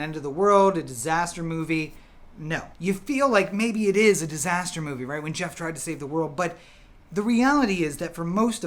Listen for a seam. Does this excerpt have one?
yes; 1 cut; at 2.7 s

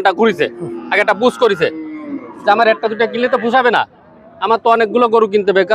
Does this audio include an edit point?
no; 0 cuts

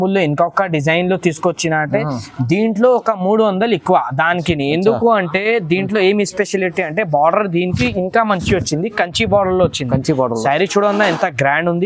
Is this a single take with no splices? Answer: yes; 0 cuts

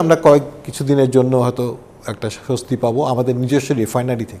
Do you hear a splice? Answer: no; 0 cuts

